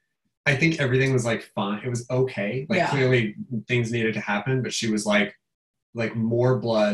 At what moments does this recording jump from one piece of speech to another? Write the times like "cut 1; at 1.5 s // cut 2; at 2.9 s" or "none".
cut 1; at 5.7 s